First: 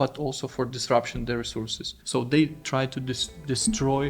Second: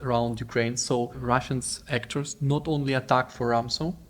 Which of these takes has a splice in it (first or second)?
second